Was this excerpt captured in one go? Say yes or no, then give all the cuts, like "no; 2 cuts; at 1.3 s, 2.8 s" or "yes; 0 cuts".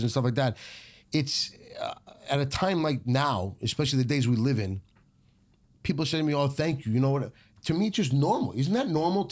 yes; 0 cuts